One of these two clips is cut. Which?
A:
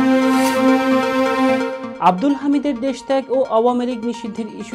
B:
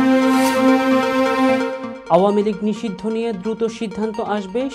A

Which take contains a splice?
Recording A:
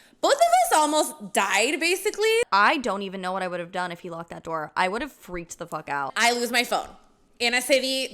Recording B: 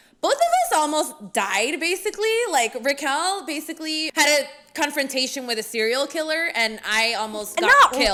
A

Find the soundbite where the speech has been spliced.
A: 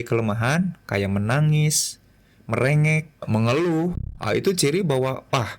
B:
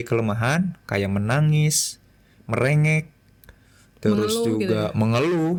A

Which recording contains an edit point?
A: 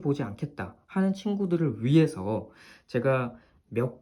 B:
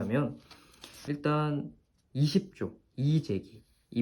B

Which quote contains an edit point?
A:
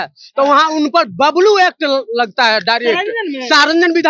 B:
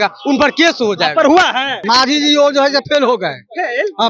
B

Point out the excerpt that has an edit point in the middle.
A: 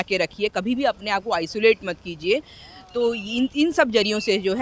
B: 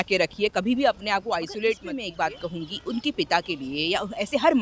B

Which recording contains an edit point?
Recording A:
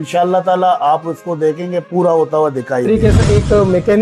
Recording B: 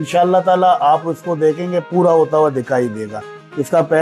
A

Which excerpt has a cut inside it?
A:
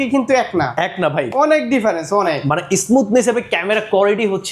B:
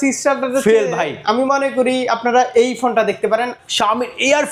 B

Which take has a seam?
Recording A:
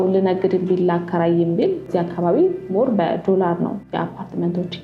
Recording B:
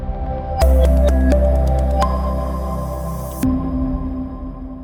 A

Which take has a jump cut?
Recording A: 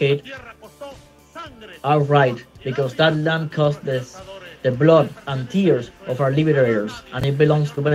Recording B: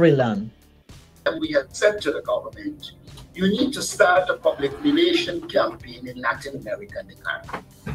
B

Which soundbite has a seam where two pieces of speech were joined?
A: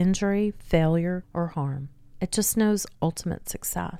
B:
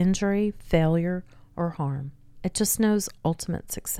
A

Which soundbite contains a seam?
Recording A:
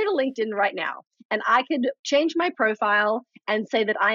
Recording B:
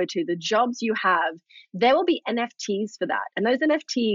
A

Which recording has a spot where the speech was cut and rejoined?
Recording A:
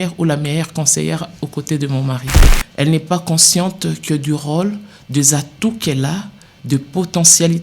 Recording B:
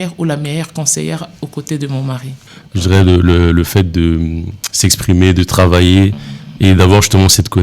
A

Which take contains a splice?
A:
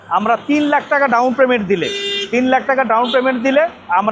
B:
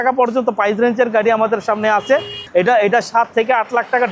B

